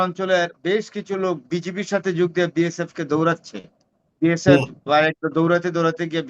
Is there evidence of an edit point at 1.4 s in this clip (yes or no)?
yes